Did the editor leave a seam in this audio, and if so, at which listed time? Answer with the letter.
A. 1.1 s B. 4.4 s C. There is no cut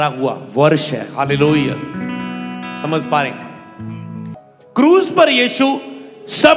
B